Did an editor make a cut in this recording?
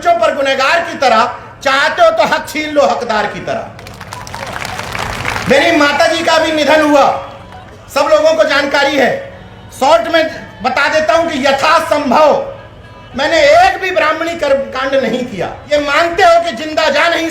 yes; 1 cut; at 15.5 s

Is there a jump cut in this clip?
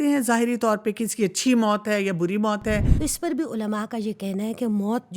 yes; 1 cut; at 2.9 s

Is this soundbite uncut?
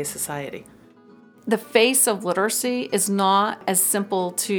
no; 2 cuts; at 1.3 s, 3.6 s

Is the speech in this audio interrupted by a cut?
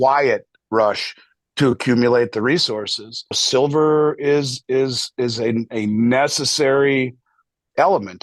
yes; 1 cut; at 3.4 s

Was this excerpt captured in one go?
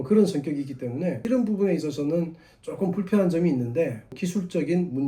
no; 2 cuts; at 1.2 s, 4.0 s

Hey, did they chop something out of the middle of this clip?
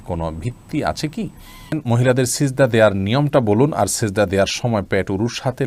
yes; 1 cut; at 1.8 s

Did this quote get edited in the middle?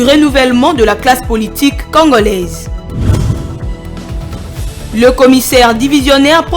yes; 1 cut; at 2.6 s

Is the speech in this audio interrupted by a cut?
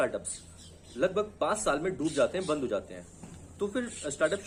no; 0 cuts

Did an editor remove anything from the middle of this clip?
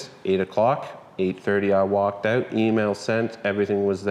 no; 0 cuts

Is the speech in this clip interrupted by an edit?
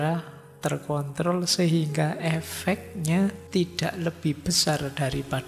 yes; 1 cut; at 3.4 s

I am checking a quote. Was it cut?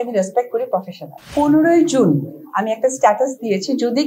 yes; 1 cut; at 1.3 s

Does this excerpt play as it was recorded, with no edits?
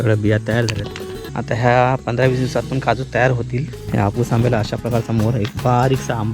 no; 2 cuts; at 1.2 s, 3.8 s

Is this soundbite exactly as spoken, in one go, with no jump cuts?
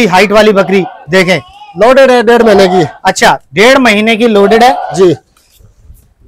yes; 0 cuts

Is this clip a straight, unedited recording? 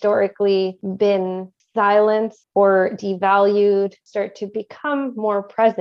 no; 3 cuts; at 1.2 s, 2.4 s, 4.0 s

